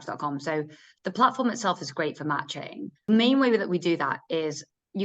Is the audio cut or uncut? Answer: cut